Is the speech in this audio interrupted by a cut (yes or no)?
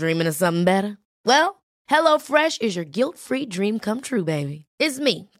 no